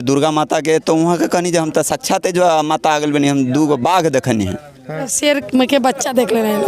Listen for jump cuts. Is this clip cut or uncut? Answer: cut